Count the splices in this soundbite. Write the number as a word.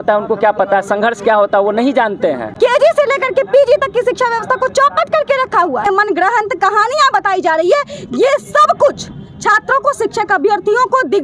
two